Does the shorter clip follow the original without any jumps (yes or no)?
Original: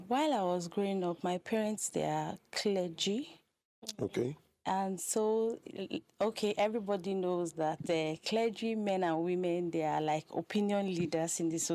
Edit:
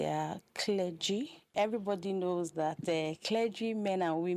no